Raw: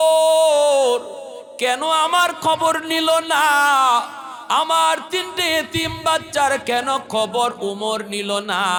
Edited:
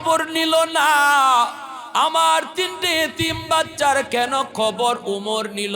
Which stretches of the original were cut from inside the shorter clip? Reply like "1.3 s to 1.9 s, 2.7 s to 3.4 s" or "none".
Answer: none